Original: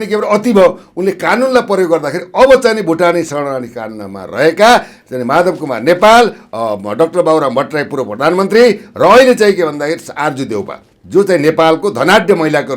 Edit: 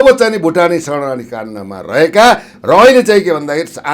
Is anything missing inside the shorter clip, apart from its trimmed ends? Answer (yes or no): yes